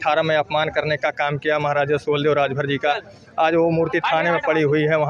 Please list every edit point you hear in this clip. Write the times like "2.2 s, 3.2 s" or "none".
none